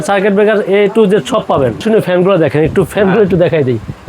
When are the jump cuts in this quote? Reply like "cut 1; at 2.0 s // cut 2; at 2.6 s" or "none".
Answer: cut 1; at 1.8 s